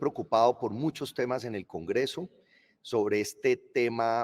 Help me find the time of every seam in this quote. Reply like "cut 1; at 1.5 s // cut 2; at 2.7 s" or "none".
none